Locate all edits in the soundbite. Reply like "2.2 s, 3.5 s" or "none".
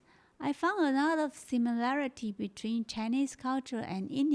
none